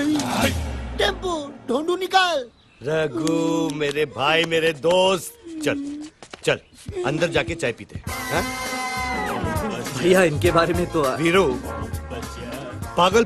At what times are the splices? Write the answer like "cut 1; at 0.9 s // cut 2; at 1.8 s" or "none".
cut 1; at 12.2 s